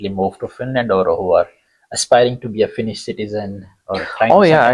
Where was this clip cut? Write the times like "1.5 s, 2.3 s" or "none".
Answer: none